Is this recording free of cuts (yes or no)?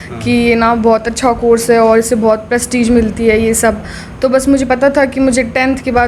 yes